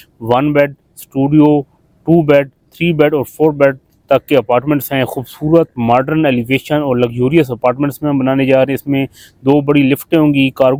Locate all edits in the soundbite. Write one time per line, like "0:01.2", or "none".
none

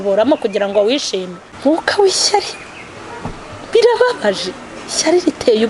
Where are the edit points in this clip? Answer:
0:01.4

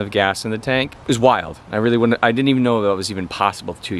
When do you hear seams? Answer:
0:00.9

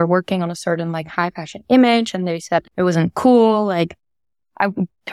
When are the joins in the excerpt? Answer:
0:02.7

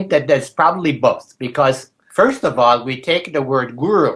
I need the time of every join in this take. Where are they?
none

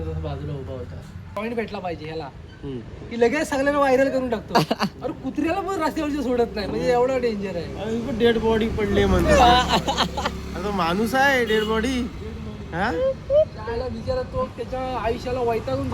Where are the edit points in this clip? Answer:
0:01.3

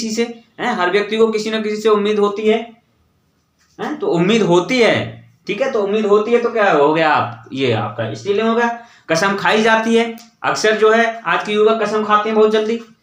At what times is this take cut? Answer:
none

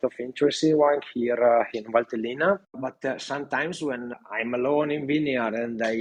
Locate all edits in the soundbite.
none

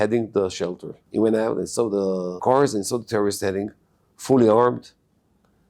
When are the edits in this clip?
0:00.9
0:02.4

